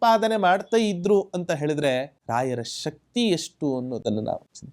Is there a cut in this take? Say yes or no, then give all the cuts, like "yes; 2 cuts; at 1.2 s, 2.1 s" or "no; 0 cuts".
yes; 1 cut; at 2.2 s